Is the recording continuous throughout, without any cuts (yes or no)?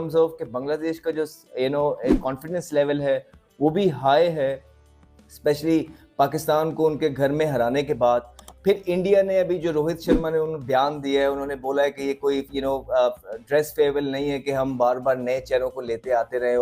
yes